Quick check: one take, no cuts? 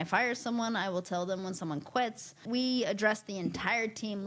no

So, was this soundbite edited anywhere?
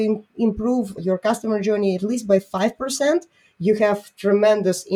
yes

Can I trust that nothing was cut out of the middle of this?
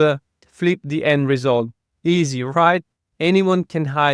no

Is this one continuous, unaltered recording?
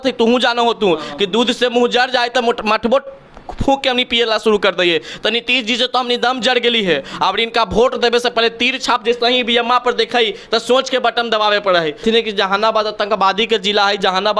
no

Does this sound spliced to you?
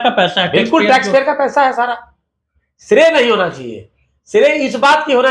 no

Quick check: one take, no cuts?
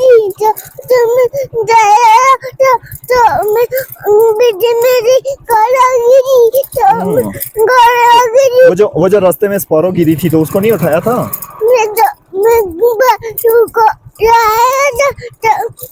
yes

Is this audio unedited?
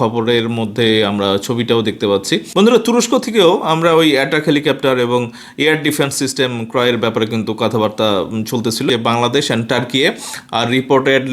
no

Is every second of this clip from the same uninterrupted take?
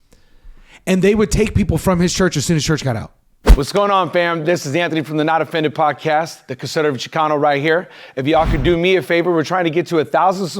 no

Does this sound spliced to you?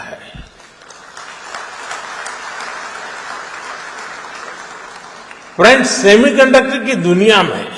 no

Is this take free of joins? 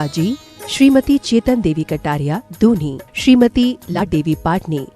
no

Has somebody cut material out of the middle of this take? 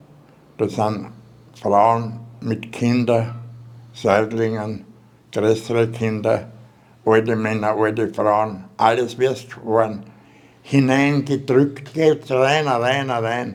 no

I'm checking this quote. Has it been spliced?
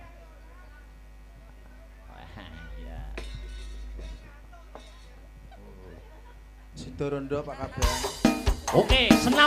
no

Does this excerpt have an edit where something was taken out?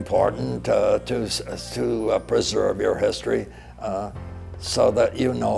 no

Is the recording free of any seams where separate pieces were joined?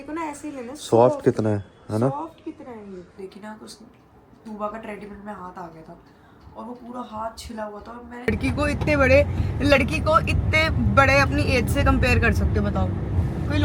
no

